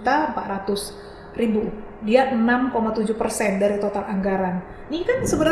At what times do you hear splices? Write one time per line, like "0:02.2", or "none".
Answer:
none